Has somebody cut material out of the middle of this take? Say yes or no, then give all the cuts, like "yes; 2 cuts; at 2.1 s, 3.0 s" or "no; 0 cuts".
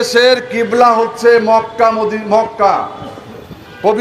no; 0 cuts